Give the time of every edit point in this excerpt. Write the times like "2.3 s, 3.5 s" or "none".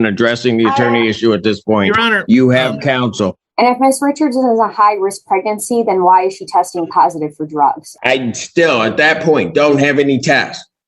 3.4 s, 7.9 s